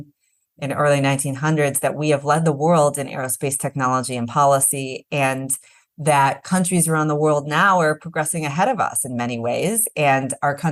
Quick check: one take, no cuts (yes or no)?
yes